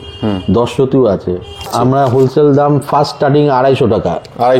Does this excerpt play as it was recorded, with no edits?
no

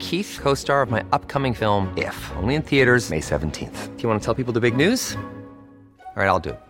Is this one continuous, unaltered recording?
yes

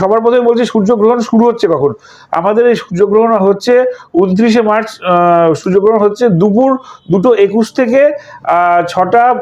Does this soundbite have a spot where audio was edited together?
no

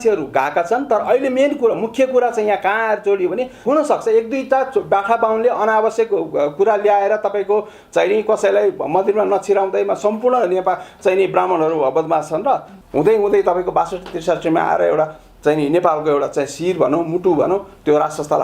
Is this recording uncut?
no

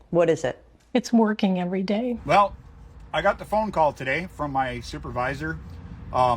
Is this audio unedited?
no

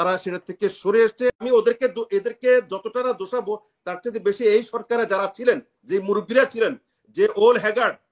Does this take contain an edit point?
yes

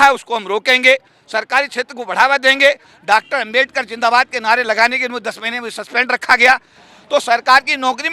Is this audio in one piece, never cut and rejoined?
no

